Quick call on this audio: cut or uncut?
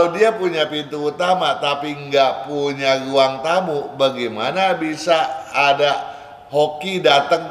uncut